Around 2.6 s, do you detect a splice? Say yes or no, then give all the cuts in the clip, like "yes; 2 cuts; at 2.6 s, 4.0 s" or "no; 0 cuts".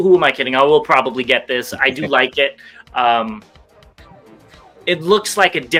no; 0 cuts